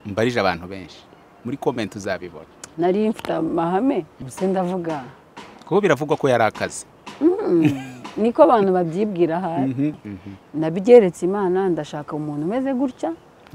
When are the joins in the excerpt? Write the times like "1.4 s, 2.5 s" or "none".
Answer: 4.2 s, 10.0 s

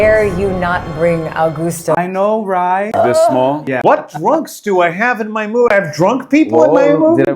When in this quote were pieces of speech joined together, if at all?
2.9 s, 3.8 s

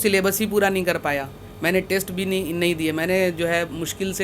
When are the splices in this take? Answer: none

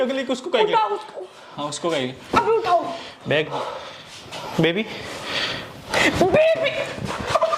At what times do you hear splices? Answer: 3.5 s

